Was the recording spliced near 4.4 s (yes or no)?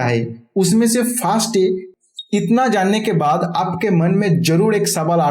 no